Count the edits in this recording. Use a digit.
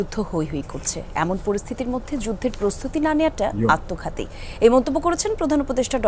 0